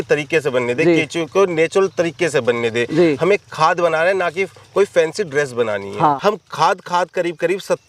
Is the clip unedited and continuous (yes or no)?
no